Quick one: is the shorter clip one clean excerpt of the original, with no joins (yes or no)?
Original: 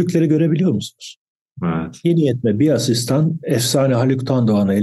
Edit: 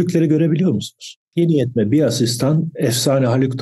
no